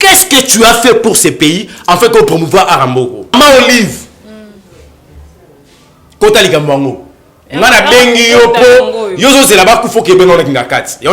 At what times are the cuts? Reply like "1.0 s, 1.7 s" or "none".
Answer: 3.3 s